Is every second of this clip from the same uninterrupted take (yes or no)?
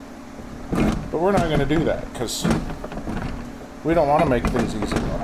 yes